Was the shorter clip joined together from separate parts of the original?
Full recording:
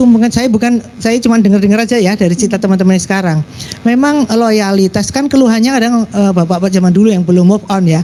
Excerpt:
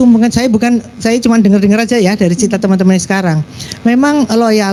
no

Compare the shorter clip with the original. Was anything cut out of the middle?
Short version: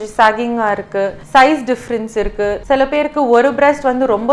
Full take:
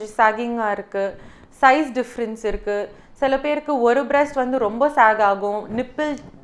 yes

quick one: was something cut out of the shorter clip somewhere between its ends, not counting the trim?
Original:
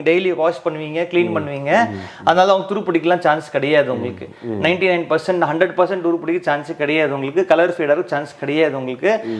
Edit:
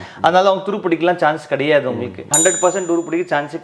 yes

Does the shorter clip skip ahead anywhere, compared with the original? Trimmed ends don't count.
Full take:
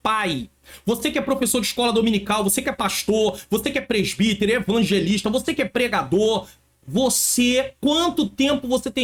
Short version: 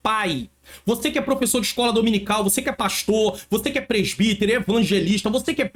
no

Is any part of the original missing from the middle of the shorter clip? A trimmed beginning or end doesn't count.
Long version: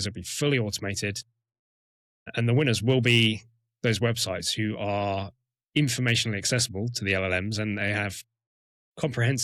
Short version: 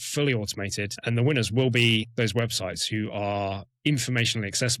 yes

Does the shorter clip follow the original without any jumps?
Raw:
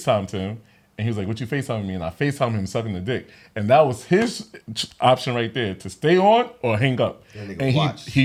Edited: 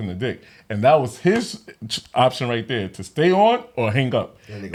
yes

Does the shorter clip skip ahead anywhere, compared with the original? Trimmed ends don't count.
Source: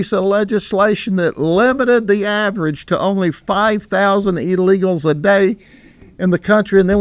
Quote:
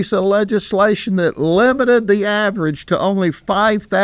no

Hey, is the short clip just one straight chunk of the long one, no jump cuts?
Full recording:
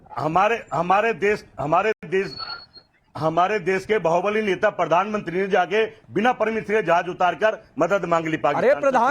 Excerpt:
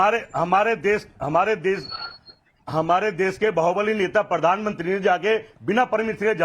no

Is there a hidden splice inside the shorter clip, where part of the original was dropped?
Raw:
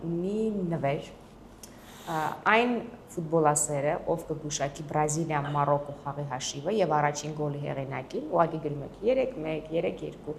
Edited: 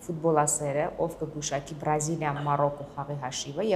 no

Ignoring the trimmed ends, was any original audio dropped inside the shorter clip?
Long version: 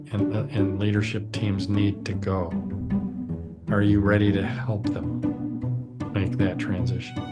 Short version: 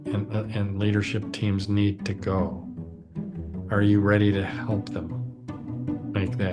yes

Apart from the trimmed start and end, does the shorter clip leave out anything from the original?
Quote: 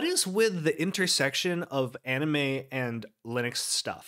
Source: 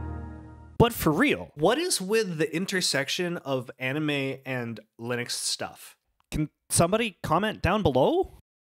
no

